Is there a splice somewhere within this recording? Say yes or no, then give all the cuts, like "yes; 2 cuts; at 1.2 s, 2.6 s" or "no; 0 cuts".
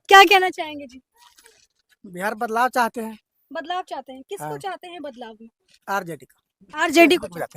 no; 0 cuts